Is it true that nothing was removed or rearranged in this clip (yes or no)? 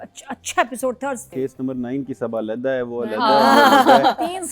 no